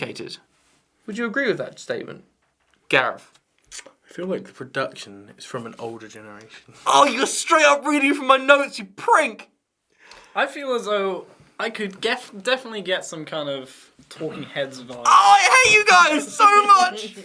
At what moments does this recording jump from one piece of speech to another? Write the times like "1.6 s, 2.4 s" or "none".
5.0 s